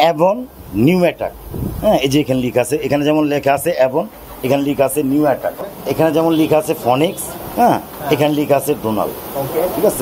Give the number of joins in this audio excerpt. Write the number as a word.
one